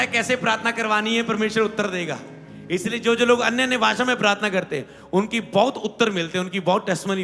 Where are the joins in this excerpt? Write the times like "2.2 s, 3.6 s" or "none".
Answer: none